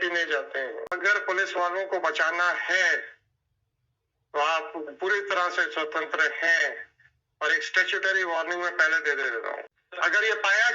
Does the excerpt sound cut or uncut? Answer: cut